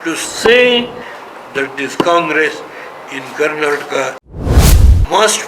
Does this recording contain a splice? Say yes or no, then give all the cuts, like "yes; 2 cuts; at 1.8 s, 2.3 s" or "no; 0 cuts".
yes; 1 cut; at 4.3 s